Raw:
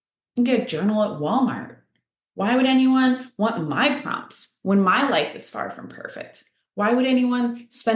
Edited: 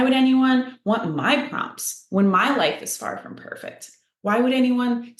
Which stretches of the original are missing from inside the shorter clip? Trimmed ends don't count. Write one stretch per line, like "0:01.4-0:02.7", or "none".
none

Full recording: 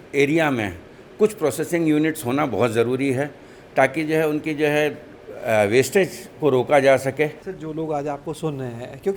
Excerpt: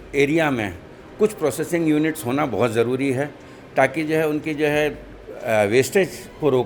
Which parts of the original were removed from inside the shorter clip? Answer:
none

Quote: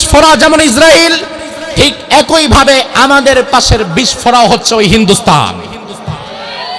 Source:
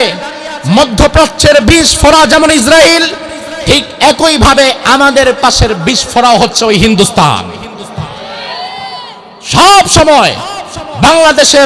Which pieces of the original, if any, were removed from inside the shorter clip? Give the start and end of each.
none

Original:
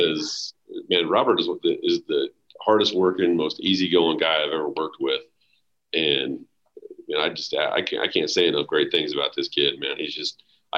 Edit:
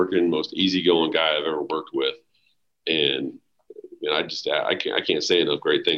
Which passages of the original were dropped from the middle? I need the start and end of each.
none

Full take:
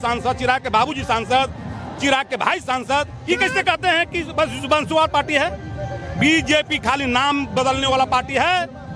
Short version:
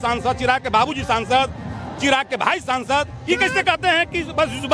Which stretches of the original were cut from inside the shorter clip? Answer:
none

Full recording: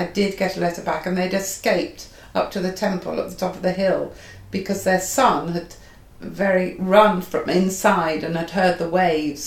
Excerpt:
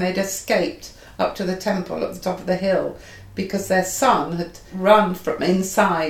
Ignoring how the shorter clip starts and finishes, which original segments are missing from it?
0:05.9-0:06.8

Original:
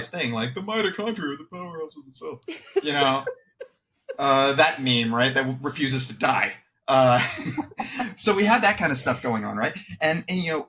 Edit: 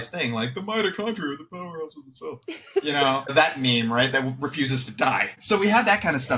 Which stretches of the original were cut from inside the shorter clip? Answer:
0:03.3-0:04.5
0:06.6-0:08.1

